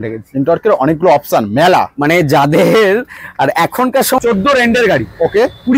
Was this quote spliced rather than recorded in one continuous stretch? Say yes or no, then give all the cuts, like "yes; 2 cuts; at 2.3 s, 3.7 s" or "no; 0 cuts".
yes; 1 cut; at 4.2 s